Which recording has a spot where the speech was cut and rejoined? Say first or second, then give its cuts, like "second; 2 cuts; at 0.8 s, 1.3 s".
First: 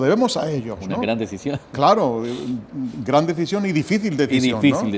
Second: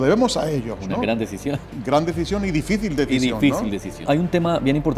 second; 2 cuts; at 1.7 s, 4.0 s